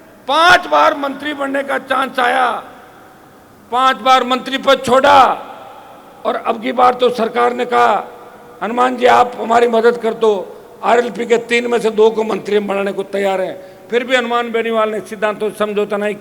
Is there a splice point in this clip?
no; 0 cuts

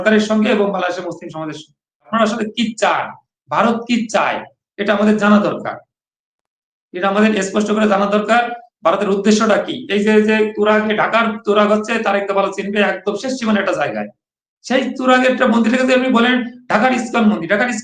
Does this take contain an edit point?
yes; 1 cut; at 2.1 s

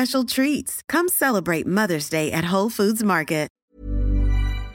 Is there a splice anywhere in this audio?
yes; 1 cut; at 3.7 s

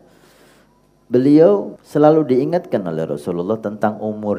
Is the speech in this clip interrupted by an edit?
yes; 1 cut; at 1.8 s

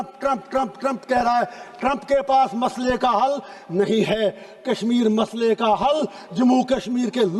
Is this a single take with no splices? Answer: yes; 0 cuts

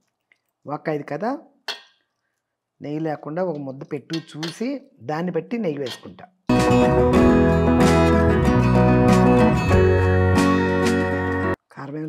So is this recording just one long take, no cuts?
yes; 0 cuts

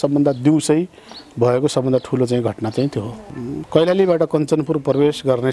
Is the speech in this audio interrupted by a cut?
yes; 1 cut; at 3.3 s

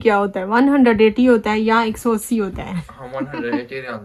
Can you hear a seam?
no; 0 cuts

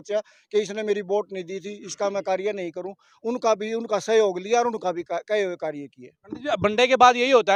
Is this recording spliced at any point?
no; 0 cuts

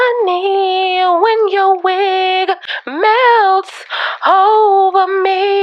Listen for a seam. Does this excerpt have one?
no; 0 cuts

